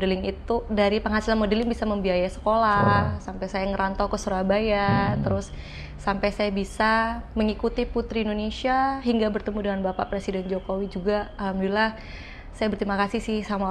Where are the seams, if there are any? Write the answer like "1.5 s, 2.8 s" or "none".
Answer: none